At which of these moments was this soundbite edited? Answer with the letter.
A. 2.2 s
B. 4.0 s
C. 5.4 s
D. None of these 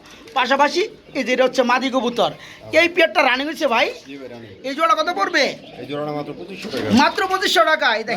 D